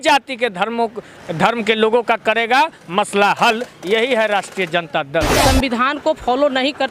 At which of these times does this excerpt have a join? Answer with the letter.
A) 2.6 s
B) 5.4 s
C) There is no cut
B